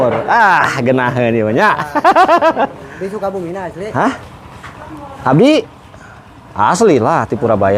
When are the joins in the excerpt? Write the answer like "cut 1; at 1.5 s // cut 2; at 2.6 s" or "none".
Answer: none

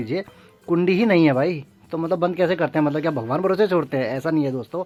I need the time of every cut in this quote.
none

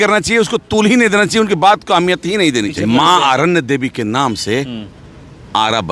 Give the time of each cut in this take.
cut 1; at 2.7 s

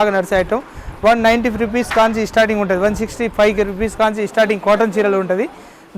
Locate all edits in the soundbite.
none

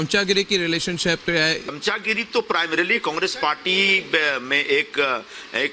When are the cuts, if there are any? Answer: cut 1; at 1.7 s

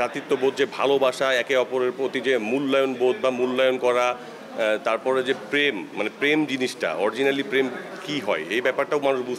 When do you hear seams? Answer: none

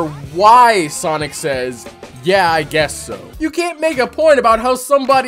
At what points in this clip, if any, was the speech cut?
cut 1; at 3.3 s

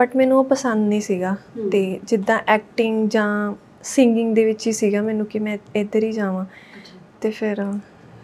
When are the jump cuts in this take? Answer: none

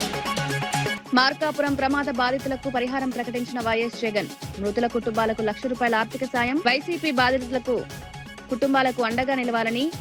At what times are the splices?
none

